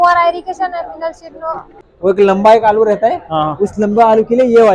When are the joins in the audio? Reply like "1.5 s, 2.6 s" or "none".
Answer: 1.8 s